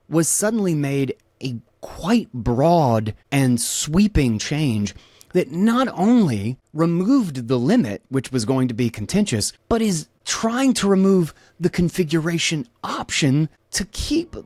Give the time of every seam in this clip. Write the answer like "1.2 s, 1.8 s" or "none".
none